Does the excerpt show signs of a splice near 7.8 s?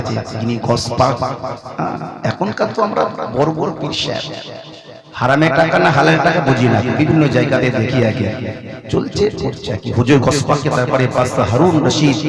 no; 0 cuts

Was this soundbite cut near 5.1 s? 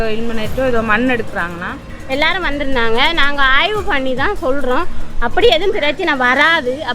no; 1 cut; at 1.9 s

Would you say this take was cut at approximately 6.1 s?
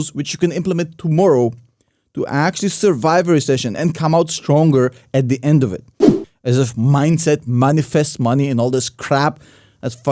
yes; 1 cut; at 6.1 s

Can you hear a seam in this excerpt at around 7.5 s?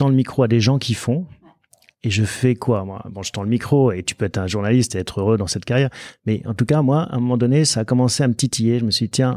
no; 0 cuts

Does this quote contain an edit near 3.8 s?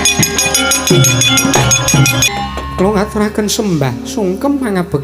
no; 1 cut; at 2.3 s

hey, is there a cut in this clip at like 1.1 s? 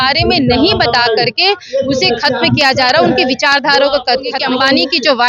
no; 1 cut; at 4.4 s

